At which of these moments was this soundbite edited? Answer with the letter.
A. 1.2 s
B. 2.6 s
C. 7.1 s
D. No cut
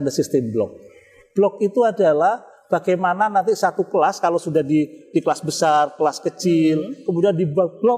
A